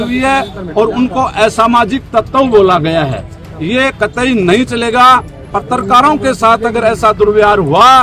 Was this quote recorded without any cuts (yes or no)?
yes